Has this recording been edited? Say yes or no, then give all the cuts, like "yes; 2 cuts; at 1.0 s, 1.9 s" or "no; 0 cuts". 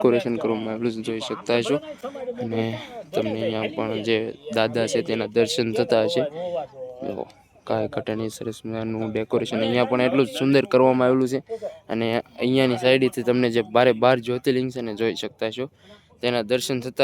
no; 0 cuts